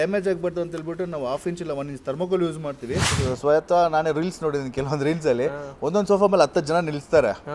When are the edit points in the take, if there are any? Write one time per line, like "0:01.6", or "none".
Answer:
0:03.1